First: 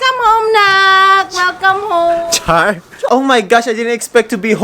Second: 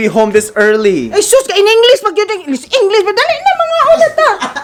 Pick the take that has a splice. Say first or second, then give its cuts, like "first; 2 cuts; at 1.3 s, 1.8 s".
first; 1 cut; at 3.0 s